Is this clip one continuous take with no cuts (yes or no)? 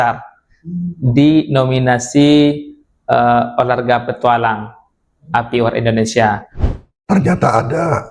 no